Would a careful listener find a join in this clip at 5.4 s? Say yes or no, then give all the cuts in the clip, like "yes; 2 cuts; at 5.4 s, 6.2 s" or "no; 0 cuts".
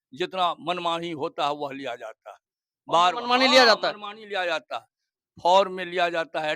no; 0 cuts